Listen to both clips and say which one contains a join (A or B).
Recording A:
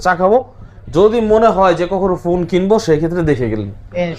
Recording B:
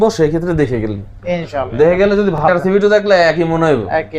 B